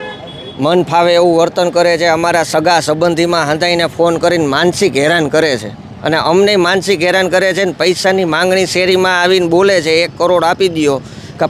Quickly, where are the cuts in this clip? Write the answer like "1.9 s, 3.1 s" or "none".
none